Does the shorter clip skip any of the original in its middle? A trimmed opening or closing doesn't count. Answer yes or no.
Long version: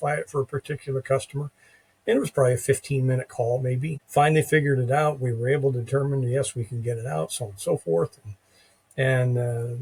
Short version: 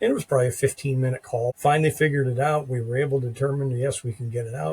yes